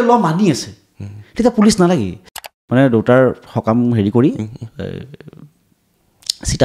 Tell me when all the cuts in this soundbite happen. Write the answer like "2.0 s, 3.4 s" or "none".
2.4 s